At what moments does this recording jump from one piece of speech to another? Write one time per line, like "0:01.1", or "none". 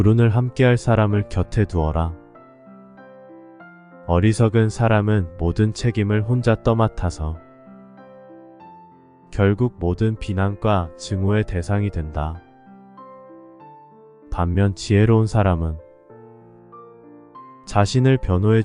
0:02.5
0:04.1
0:12.4
0:14.1